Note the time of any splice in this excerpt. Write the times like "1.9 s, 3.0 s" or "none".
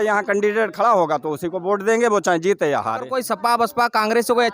3.0 s